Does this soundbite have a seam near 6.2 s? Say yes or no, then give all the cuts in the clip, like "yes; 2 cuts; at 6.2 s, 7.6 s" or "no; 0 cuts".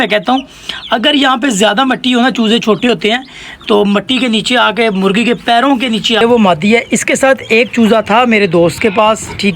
yes; 1 cut; at 6.2 s